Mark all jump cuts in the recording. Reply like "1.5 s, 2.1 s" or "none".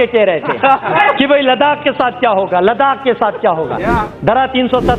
1.0 s, 4.0 s